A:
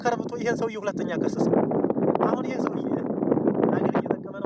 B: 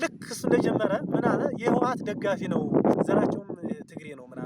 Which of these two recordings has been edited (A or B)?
B